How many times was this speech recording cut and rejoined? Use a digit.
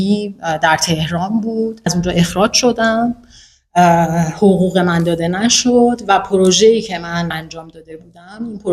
2